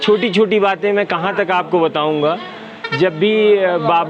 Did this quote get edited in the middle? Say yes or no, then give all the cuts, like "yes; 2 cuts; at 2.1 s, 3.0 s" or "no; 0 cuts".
no; 0 cuts